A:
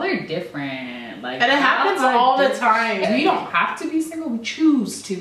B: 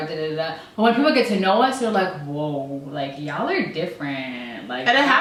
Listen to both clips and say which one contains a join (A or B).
A